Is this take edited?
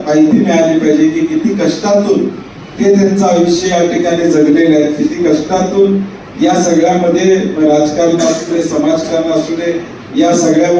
no; 0 cuts

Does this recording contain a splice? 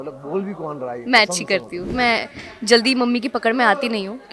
yes; 1 cut; at 1.9 s

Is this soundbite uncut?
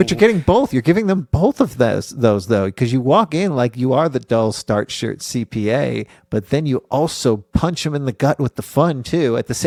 yes; 0 cuts

